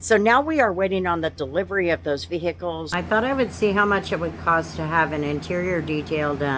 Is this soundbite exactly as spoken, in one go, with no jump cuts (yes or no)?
no